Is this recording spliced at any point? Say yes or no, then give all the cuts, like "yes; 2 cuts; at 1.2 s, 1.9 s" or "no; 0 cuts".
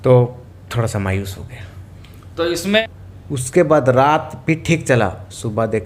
yes; 1 cut; at 2.8 s